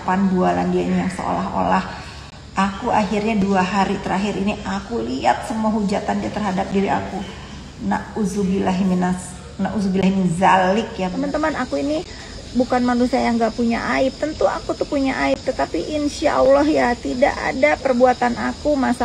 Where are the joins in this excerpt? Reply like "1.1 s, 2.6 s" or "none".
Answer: 11.1 s